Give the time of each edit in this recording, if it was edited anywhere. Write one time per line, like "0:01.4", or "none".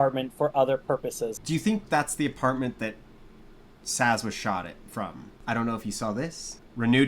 0:01.3
0:05.3